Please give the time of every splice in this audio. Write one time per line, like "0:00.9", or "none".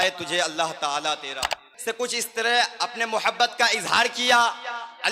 0:01.7